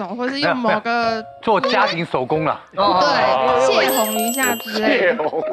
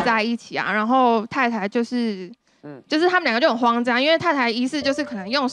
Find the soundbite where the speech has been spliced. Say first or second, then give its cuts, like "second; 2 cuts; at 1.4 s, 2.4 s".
first; 1 cut; at 3.6 s